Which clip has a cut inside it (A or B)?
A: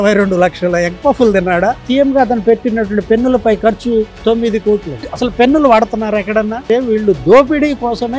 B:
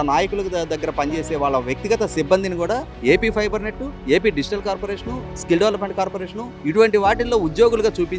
A